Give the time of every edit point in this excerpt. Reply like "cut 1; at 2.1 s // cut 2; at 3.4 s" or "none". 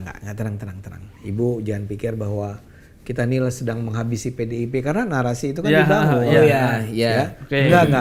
none